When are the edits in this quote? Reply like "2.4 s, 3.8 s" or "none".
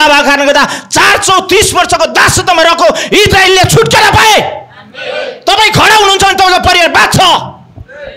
none